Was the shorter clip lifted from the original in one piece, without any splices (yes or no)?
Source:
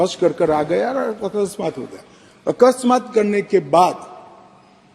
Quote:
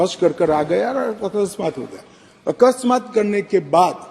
yes